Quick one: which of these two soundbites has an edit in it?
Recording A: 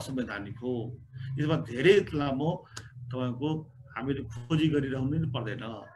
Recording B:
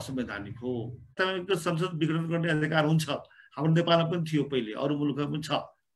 B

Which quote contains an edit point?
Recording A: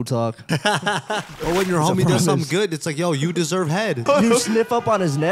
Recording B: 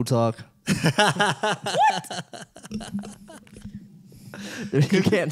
A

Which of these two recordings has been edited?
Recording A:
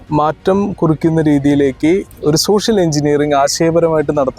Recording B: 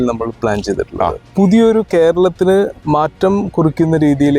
B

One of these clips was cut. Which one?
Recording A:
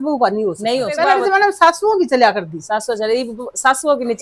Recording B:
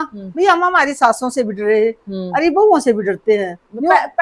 A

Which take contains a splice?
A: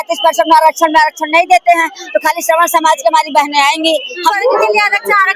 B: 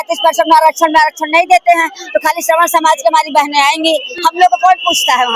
A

